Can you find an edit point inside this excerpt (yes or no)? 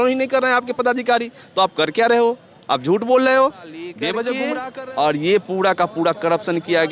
yes